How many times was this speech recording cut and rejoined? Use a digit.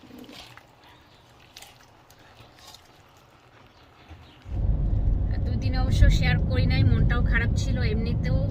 1